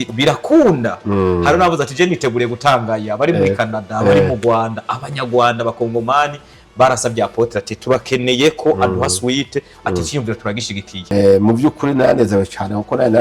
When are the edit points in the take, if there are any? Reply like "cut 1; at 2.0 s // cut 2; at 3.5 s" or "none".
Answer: cut 1; at 11.0 s